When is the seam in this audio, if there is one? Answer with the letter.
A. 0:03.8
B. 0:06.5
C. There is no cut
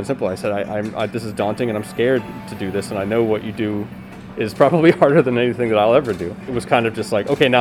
B